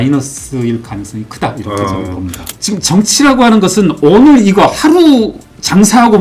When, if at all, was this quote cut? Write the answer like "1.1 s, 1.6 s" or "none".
2.6 s